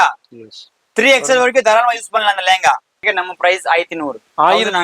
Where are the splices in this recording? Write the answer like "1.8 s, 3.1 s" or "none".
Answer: 3.0 s